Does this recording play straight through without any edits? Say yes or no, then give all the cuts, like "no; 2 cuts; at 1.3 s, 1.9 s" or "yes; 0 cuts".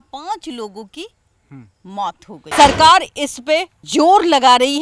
no; 1 cut; at 2.5 s